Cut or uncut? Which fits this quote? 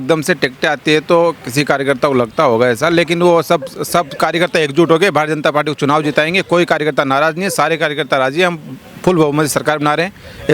uncut